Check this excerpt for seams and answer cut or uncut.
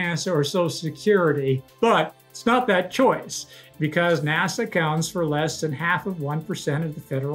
cut